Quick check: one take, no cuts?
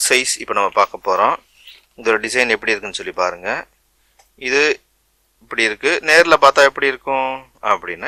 yes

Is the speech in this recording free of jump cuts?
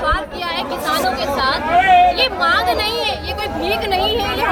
yes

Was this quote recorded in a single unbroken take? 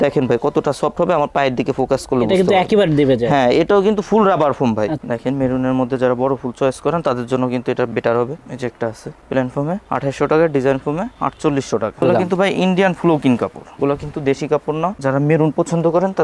no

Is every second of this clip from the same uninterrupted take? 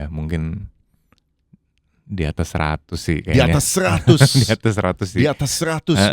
yes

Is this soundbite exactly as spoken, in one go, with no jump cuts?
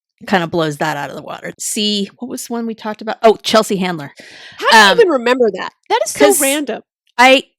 no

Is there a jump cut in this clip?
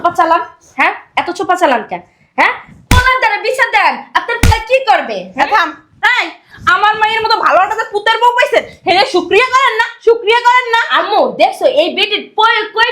no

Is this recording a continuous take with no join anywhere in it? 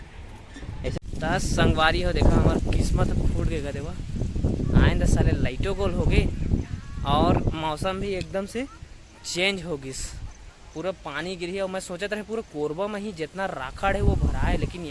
no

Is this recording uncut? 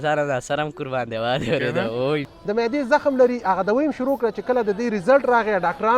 no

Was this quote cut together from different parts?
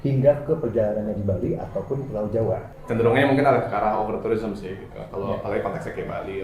yes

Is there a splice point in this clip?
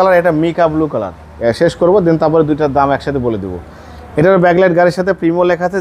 no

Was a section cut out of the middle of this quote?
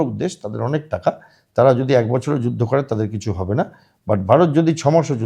no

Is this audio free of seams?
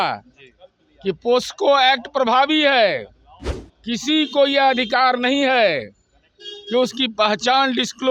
yes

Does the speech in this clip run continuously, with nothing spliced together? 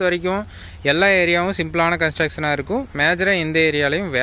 yes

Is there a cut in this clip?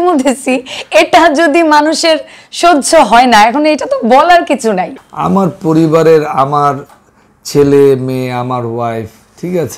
yes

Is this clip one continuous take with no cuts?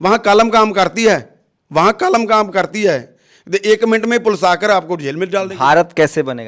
yes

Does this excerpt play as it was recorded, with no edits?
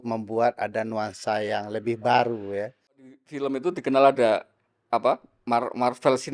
no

